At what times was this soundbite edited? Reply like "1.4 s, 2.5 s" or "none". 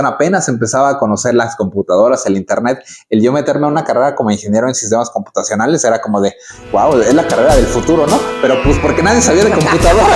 none